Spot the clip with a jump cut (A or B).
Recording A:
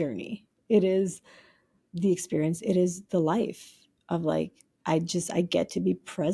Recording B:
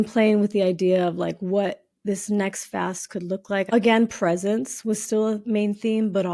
B